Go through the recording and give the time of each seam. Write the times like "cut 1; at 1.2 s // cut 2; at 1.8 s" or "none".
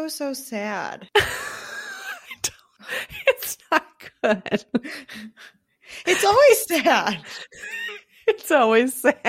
cut 1; at 1.0 s